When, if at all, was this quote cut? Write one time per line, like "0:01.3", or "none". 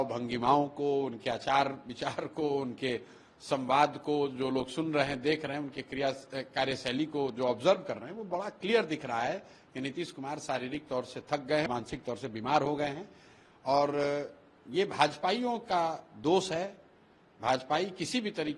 0:11.7

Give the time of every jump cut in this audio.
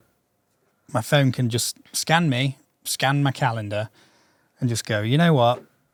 none

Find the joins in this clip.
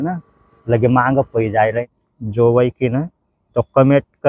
0:01.9

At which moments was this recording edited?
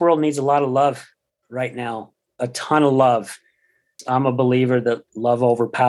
0:03.9

